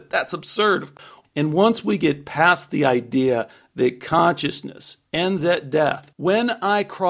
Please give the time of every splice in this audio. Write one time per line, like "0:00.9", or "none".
0:00.9
0:06.1